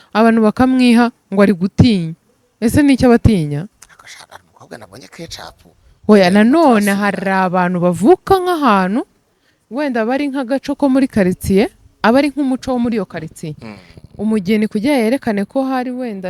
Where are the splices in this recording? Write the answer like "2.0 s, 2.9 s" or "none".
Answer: none